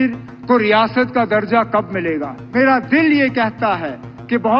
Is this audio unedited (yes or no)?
no